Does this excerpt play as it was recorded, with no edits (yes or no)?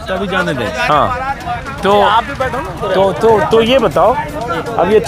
yes